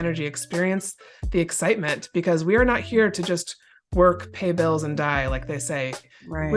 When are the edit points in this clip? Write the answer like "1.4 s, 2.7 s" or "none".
none